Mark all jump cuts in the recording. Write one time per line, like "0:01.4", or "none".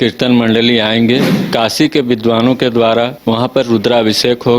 0:01.3
0:03.2